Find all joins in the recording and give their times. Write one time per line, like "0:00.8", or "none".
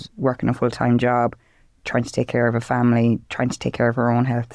none